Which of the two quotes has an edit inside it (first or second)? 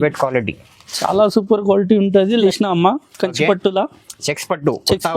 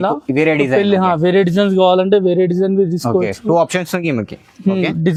first